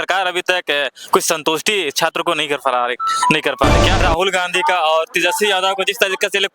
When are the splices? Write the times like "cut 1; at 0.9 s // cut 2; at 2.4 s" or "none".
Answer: cut 1; at 4.0 s